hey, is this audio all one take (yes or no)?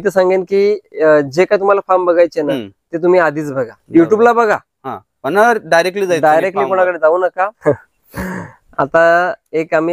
no